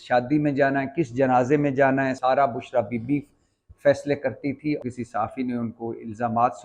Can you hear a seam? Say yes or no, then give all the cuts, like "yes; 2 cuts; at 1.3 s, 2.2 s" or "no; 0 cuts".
yes; 2 cuts; at 2.2 s, 4.8 s